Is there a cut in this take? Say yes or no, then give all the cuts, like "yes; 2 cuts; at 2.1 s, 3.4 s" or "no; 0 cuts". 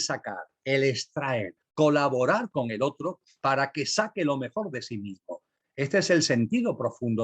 yes; 1 cut; at 1.6 s